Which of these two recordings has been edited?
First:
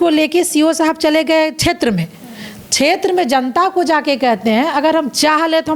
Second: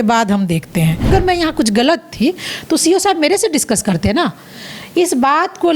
second; 1 cut; at 1.1 s

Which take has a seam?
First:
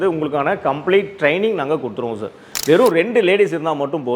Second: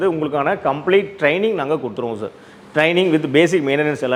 first; 1 cut; at 2.5 s

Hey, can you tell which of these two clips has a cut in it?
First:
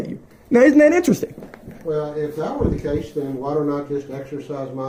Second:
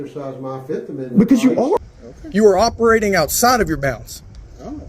second; 1 cut; at 1.8 s

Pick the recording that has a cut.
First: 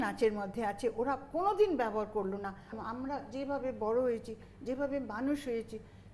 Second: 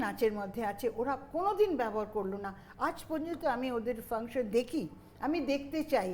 first; 1 cut; at 2.7 s

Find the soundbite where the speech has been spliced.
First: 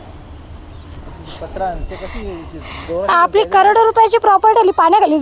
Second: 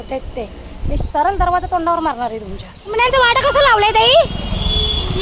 second; 1 cut; at 2.9 s

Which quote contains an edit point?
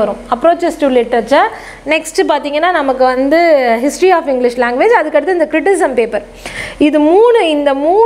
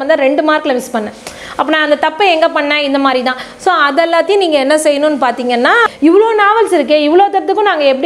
second; 1 cut; at 5.9 s

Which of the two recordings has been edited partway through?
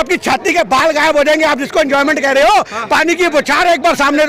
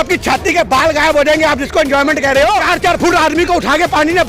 second; 1 cut; at 2.6 s

